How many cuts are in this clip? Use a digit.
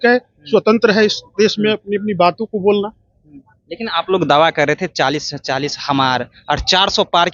0